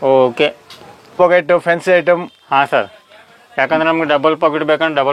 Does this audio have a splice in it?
yes; 1 cut; at 1.2 s

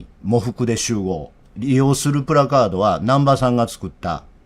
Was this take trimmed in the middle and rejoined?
yes; 1 cut; at 1.5 s

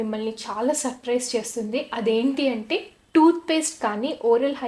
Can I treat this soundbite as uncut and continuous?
yes; 0 cuts

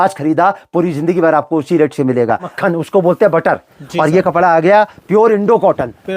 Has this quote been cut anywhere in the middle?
yes; 1 cut; at 2.5 s

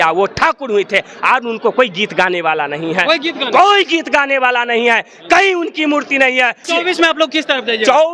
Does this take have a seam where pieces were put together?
yes; 1 cut; at 6.7 s

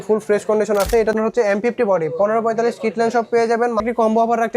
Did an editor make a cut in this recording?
yes; 2 cuts; at 1.1 s, 3.8 s

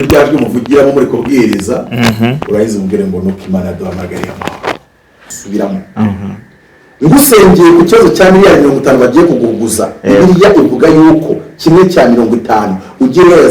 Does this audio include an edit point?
yes; 1 cut; at 5.3 s

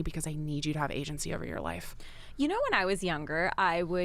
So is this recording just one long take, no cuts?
yes; 0 cuts

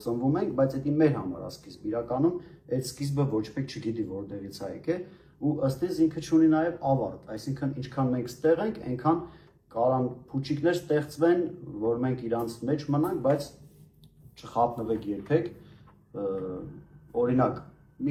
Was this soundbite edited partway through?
no; 0 cuts

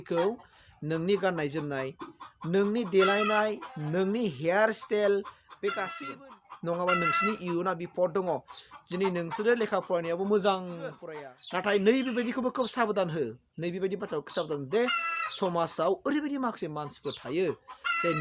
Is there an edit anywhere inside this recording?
yes; 2 cuts; at 6.0 s, 11.0 s

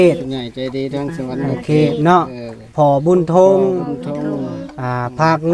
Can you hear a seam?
no; 0 cuts

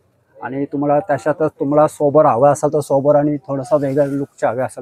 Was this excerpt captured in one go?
yes; 0 cuts

